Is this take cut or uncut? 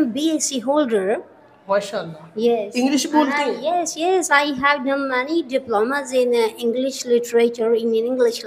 uncut